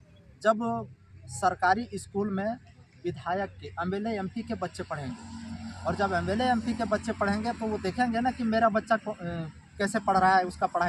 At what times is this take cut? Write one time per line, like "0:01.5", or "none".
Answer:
none